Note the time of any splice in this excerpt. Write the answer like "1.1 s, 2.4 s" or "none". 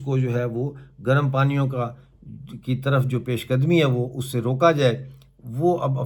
none